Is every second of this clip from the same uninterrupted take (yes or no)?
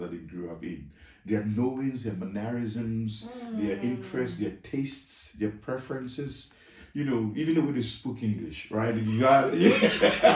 yes